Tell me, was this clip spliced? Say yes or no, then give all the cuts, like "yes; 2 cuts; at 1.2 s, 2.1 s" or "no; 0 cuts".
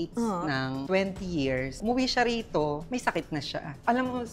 yes; 1 cut; at 1.7 s